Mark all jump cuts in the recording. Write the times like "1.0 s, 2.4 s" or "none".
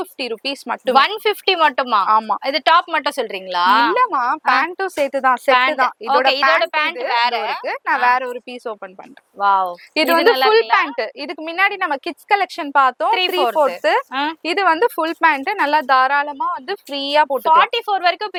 none